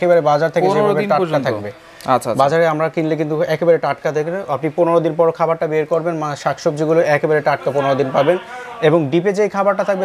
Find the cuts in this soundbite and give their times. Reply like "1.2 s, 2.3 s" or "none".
none